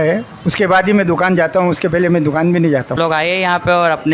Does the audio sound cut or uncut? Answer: cut